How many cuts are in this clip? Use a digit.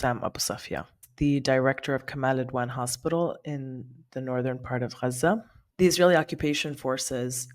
2